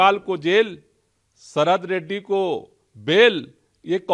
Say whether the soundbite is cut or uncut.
uncut